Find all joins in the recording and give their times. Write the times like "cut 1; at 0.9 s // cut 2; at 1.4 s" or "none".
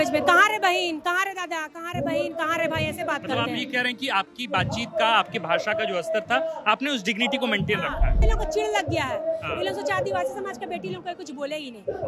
cut 1; at 8.2 s